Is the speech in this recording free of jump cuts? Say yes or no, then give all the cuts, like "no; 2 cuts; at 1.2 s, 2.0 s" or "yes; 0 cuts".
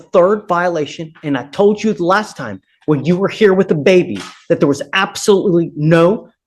yes; 0 cuts